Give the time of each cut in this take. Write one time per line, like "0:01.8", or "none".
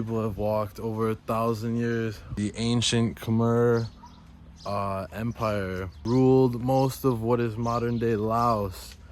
0:02.2
0:05.9